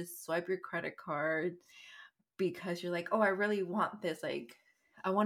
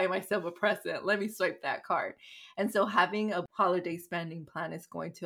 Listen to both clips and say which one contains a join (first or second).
second